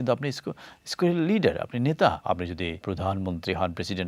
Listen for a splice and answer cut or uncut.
cut